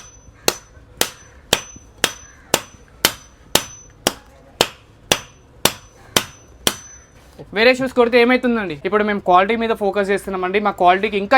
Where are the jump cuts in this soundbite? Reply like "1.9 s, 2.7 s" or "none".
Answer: none